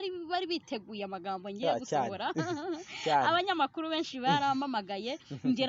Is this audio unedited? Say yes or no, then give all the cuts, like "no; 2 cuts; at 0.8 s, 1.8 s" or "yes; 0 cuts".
yes; 0 cuts